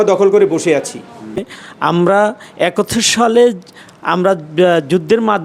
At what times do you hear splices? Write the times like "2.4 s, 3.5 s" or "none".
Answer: 1.5 s